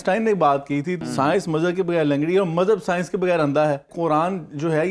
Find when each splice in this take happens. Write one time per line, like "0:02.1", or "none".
0:01.0
0:03.9